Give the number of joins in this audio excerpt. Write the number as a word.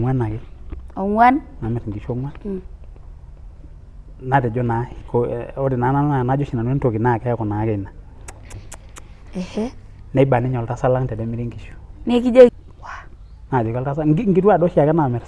one